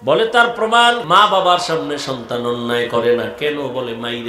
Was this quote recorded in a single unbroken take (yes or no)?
no